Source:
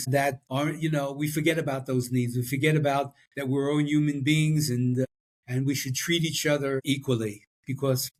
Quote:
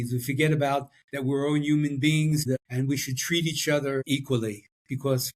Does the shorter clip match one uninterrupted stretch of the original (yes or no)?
no